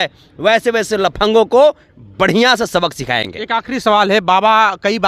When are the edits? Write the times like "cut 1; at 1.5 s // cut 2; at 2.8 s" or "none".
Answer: none